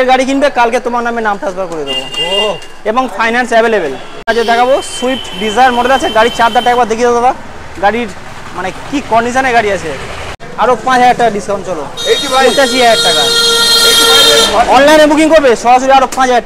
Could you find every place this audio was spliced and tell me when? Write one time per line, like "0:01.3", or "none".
0:04.3
0:10.4